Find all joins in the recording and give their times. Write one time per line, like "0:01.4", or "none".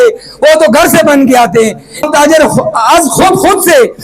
0:02.0